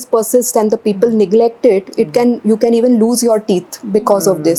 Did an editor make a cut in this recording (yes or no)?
no